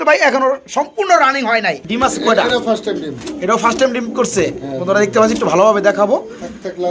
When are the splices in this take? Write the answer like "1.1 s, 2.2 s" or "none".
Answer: 1.8 s